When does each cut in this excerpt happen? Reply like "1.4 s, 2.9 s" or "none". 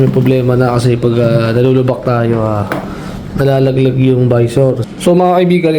4.8 s

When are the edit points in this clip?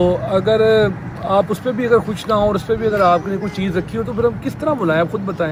none

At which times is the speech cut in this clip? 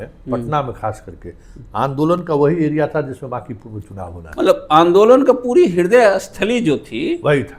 none

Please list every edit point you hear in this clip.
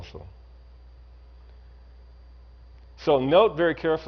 none

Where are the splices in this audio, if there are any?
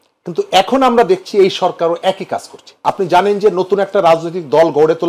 2.7 s

